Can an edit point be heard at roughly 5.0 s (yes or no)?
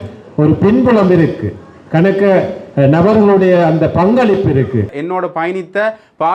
yes